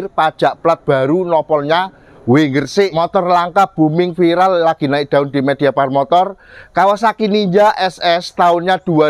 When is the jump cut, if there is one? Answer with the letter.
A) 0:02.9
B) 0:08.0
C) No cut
A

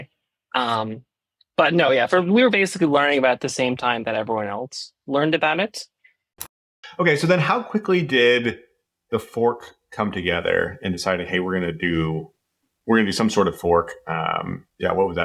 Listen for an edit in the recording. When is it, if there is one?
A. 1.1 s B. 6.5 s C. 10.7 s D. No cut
B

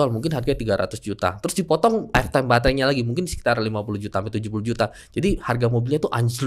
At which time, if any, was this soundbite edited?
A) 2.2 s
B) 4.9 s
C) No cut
A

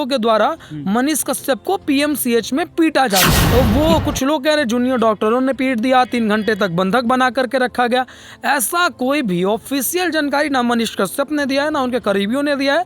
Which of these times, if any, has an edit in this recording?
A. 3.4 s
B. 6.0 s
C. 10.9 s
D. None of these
A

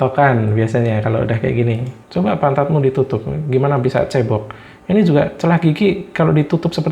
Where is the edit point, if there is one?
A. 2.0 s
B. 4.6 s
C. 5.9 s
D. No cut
A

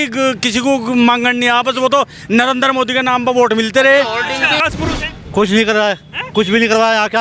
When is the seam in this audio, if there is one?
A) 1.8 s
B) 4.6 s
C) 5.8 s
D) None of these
B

